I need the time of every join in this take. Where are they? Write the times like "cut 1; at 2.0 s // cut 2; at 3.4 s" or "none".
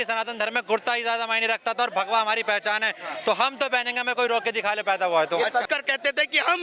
cut 1; at 5.7 s